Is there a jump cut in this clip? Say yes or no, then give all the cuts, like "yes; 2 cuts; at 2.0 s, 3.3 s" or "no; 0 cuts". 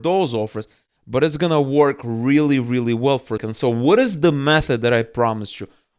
yes; 1 cut; at 3.5 s